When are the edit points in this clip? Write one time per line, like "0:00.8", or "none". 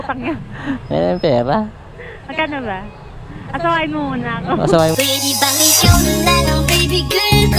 0:05.0